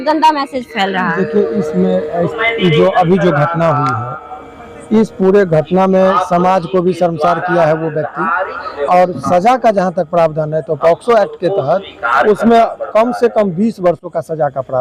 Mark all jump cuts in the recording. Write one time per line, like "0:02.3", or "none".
none